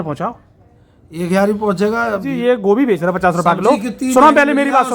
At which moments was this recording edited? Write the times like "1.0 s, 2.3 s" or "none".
2.3 s